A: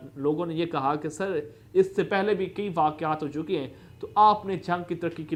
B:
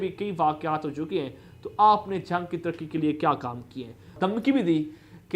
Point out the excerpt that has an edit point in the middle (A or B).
B